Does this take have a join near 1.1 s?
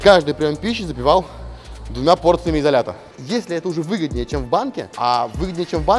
no; 2 cuts; at 3.2 s, 4.9 s

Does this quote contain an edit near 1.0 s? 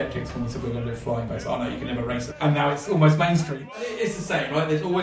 no; 2 cuts; at 2.3 s, 3.5 s

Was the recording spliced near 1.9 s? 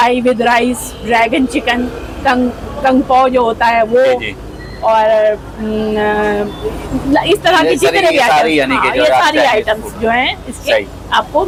no; 0 cuts

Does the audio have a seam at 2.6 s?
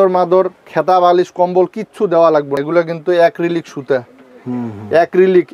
yes; 1 cut; at 2.6 s

